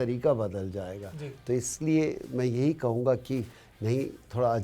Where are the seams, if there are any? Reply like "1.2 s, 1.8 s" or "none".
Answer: none